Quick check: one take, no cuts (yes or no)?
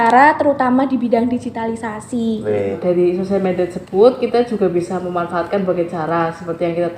no